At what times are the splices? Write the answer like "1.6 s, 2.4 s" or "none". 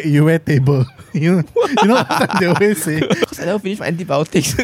3.3 s